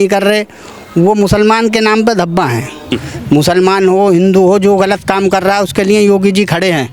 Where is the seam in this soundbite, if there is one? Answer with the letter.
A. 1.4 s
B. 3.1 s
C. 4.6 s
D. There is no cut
B